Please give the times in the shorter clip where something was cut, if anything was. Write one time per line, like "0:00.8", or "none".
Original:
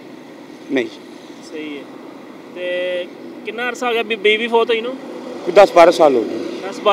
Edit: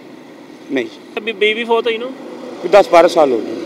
0:01.2